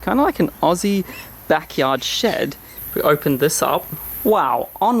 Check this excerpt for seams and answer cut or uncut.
cut